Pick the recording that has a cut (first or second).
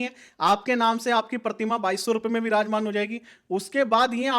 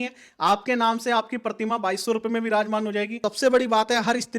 second